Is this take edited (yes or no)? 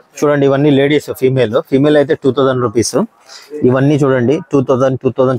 no